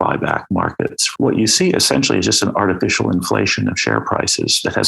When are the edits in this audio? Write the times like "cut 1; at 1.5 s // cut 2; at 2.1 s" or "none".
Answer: cut 1; at 1.0 s

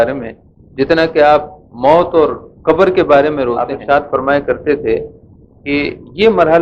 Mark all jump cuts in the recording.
cut 1; at 3.8 s

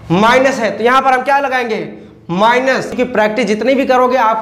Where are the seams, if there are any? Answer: cut 1; at 3.0 s

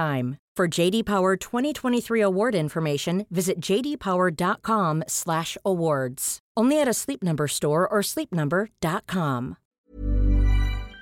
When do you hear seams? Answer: cut 1; at 9.7 s

